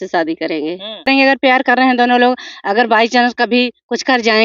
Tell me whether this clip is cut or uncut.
cut